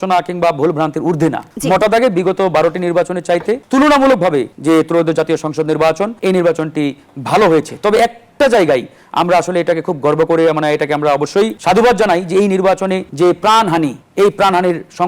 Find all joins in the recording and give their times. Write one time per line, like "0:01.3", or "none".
0:01.5
0:03.6
0:04.5
0:06.1
0:11.6
0:13.1
0:14.0